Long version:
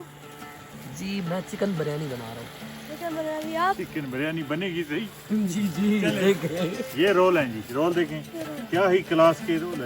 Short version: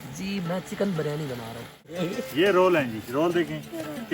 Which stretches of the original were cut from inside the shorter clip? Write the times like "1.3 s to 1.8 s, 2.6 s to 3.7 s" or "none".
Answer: 2.7 s to 6.5 s